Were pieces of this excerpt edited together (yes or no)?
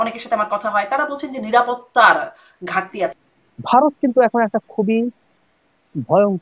yes